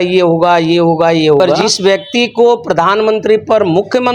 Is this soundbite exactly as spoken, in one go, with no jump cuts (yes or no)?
no